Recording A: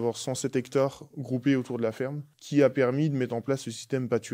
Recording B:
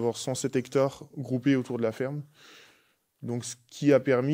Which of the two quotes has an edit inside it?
A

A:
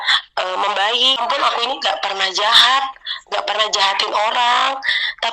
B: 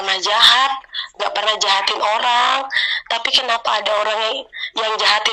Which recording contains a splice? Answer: A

